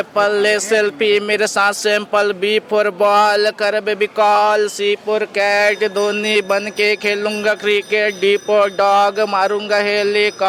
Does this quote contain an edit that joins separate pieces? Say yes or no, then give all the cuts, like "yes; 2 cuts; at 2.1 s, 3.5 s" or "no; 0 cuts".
no; 0 cuts